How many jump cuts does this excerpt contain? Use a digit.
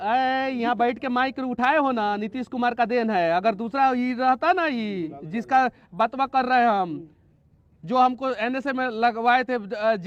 0